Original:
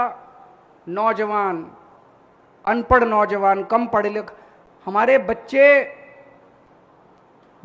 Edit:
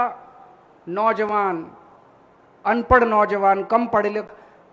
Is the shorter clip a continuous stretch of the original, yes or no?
yes